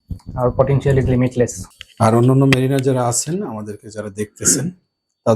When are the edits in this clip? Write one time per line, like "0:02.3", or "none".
0:01.7